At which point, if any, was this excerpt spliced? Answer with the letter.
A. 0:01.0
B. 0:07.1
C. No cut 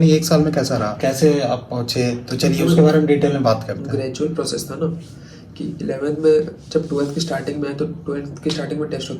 C